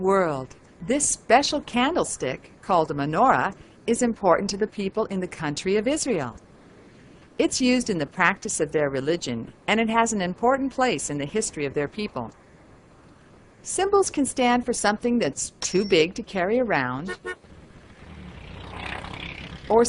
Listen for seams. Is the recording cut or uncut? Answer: uncut